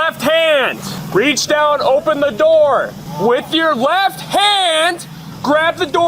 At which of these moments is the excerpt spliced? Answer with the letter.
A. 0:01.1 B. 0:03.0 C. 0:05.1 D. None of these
B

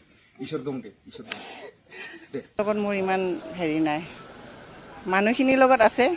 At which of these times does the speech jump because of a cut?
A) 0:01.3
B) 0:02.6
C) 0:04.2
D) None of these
B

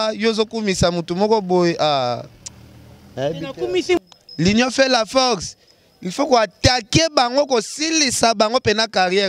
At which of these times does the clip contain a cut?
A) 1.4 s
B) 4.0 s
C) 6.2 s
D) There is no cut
B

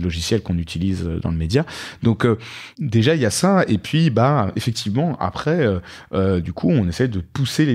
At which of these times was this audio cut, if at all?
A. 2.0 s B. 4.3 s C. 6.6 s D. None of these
D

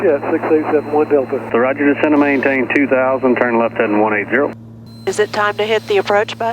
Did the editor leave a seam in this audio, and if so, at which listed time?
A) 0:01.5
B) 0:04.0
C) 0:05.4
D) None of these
A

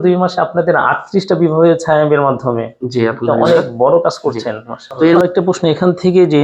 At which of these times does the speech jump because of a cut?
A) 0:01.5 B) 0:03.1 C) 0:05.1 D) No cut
C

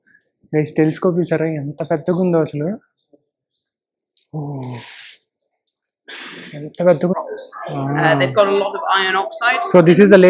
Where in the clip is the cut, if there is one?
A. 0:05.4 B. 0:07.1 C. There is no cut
B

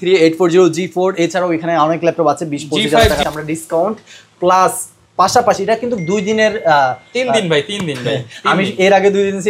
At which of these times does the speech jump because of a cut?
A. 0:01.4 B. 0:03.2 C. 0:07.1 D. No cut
B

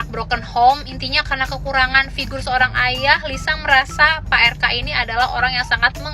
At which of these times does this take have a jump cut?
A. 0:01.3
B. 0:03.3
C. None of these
C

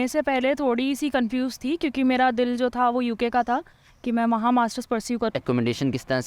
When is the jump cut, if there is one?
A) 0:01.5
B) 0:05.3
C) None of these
B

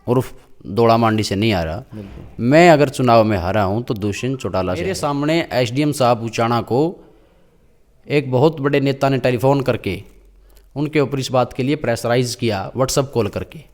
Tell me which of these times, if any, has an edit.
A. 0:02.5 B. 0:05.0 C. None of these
B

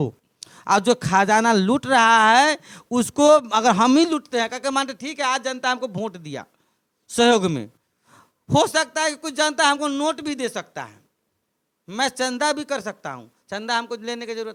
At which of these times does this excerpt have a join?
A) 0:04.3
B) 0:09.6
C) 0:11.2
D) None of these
D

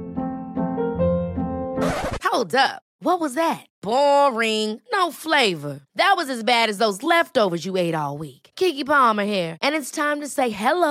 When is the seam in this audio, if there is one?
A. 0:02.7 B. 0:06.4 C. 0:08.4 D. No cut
D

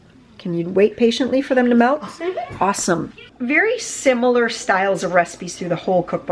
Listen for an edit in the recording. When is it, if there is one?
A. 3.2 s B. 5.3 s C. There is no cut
A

